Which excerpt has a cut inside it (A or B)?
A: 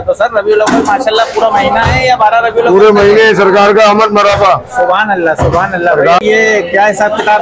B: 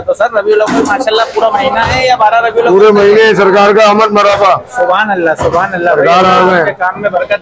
A